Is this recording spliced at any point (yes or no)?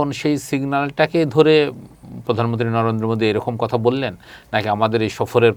no